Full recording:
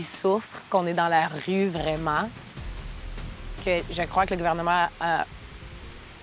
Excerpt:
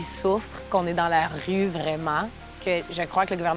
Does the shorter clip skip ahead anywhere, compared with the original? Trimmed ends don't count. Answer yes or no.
yes